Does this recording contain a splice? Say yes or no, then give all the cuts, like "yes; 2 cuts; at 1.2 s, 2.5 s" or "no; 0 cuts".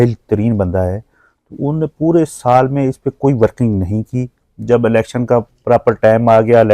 no; 0 cuts